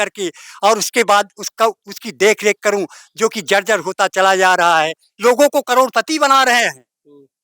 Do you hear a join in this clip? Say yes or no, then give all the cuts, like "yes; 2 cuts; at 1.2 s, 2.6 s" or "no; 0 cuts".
yes; 1 cut; at 5.1 s